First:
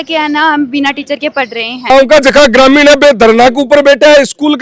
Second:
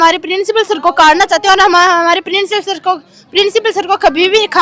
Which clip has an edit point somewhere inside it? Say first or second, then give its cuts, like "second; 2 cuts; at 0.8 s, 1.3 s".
first; 1 cut; at 1.9 s